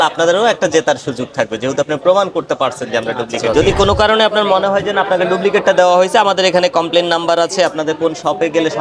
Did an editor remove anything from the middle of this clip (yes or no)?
yes